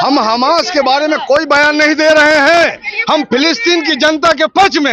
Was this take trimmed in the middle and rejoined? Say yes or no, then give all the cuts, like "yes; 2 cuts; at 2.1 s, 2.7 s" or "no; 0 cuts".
no; 0 cuts